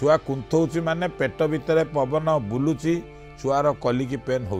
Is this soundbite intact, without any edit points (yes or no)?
yes